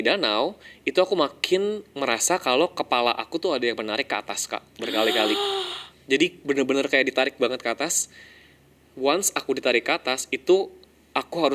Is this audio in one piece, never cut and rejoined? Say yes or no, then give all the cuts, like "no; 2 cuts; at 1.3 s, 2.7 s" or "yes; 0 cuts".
yes; 0 cuts